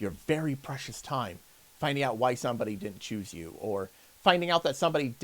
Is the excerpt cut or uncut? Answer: uncut